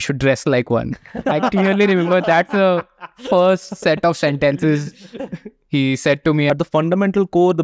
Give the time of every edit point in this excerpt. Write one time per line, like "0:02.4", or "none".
0:06.5